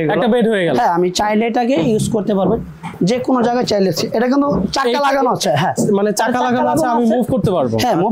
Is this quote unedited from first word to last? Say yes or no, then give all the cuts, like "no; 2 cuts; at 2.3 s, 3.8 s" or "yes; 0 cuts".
yes; 0 cuts